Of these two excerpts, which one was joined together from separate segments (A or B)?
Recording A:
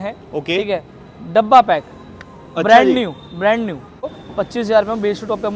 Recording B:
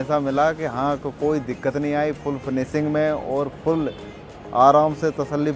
A